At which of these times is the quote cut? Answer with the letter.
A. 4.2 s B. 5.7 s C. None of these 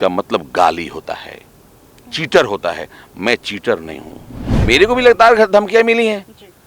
A